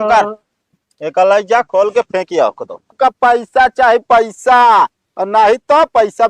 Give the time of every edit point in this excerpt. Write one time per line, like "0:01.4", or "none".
0:02.9